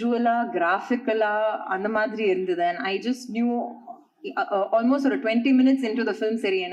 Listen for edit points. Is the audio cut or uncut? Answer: uncut